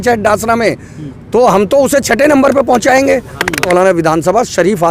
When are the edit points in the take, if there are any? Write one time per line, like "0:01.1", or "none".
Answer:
0:03.7